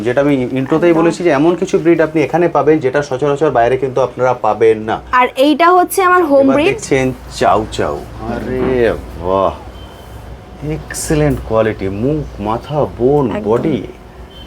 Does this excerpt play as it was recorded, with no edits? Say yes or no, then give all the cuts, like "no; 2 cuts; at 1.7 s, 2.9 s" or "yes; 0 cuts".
no; 1 cut; at 6.8 s